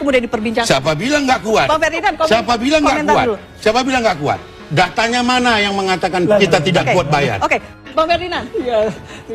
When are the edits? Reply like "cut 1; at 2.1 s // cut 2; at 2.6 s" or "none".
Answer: cut 1; at 7.7 s